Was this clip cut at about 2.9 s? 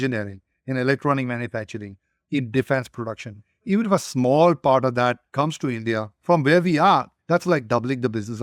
no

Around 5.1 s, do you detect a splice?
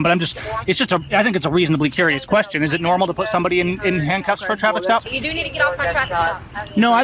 yes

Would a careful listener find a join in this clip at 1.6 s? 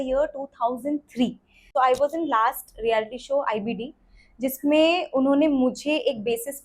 yes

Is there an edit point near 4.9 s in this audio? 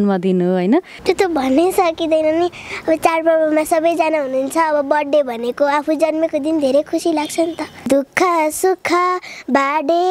no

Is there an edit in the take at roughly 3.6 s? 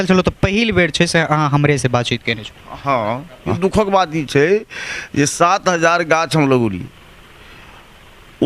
yes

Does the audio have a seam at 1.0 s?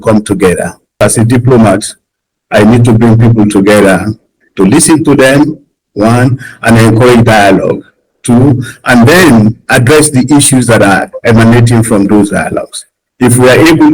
yes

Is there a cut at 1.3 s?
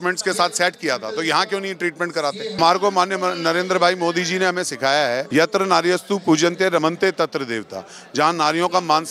no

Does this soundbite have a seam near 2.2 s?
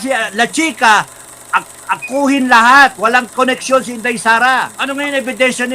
no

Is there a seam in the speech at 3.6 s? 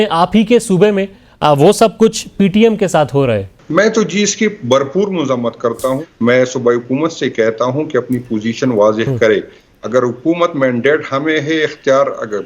yes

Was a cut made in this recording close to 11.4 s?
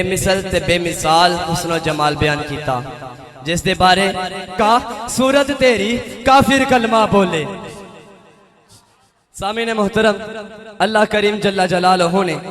no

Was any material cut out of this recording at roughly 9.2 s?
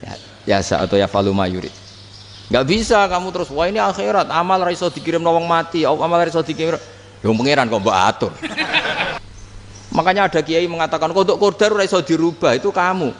yes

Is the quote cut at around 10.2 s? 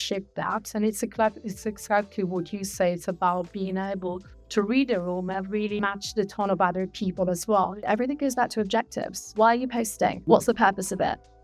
yes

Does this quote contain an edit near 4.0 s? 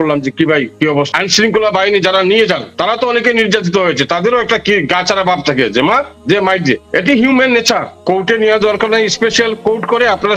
no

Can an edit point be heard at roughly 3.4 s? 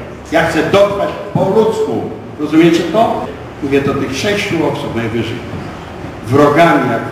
yes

